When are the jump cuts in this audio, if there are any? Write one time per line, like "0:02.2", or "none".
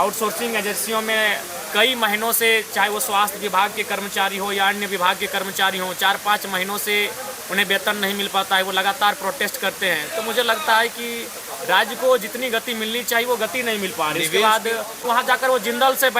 0:15.0